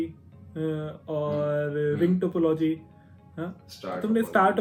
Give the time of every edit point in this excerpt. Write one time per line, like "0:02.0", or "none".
none